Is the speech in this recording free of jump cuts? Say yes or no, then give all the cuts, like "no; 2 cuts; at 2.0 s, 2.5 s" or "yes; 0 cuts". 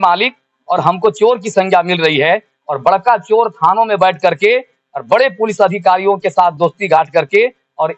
yes; 0 cuts